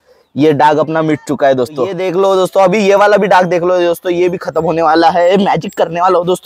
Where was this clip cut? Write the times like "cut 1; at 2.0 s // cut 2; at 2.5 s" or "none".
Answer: cut 1; at 2.0 s